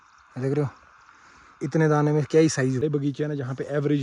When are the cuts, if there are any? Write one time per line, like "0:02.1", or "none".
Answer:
0:02.8